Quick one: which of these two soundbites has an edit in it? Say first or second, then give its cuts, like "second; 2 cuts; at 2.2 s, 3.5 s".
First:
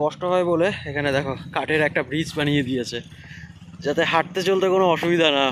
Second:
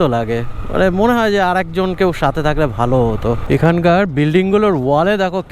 second; 1 cut; at 3.4 s